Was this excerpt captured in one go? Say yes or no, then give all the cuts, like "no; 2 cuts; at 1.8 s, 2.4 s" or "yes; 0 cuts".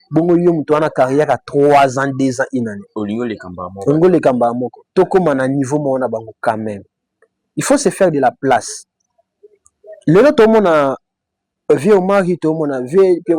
yes; 0 cuts